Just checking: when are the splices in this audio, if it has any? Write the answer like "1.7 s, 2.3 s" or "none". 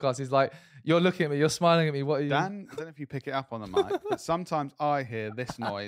2.7 s